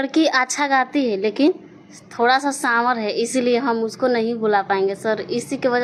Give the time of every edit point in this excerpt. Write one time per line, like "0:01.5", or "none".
none